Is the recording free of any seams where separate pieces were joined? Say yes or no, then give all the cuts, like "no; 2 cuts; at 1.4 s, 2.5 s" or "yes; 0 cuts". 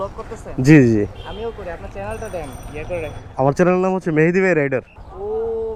yes; 0 cuts